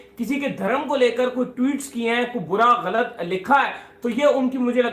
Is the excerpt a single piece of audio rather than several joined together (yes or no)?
yes